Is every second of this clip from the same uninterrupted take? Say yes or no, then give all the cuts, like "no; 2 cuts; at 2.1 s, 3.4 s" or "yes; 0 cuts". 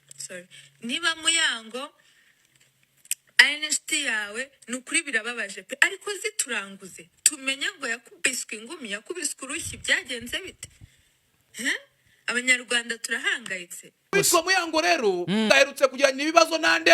no; 2 cuts; at 14.1 s, 15.5 s